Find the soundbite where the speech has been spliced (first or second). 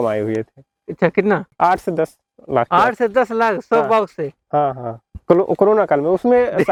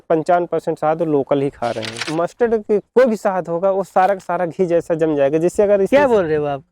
second